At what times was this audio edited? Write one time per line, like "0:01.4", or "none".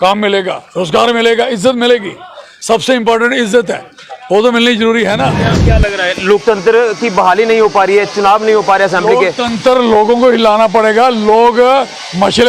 0:05.5